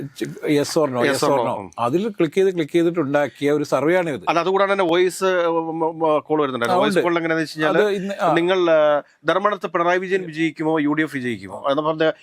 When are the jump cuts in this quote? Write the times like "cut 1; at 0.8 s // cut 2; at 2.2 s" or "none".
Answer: none

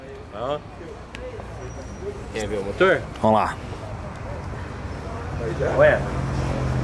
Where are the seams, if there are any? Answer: none

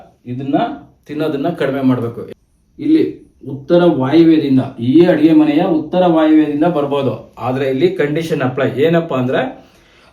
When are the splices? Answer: cut 1; at 2.2 s

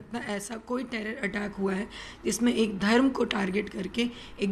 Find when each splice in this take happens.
none

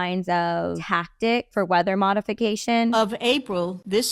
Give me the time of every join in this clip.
cut 1; at 1.5 s // cut 2; at 2.9 s

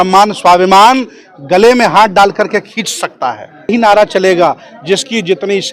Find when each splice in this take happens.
cut 1; at 3.7 s

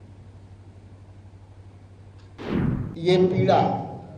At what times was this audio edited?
cut 1; at 2.4 s

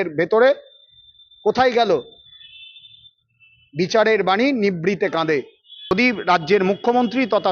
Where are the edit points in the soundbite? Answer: cut 1; at 5.9 s

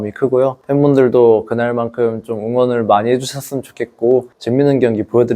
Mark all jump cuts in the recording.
cut 1; at 4.3 s

